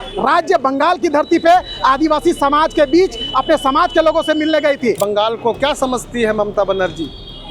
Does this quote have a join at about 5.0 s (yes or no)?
yes